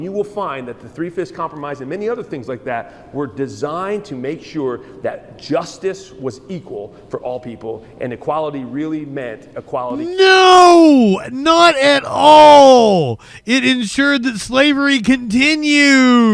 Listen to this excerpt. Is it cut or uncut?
uncut